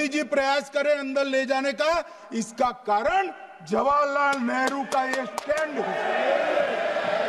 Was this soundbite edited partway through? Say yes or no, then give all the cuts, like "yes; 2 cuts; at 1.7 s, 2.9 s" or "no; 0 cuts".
no; 0 cuts